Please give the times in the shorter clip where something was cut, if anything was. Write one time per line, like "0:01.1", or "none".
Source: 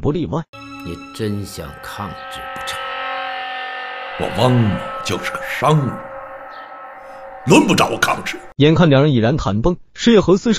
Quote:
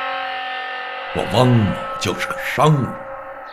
none